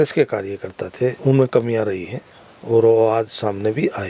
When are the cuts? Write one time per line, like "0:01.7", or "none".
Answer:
0:01.2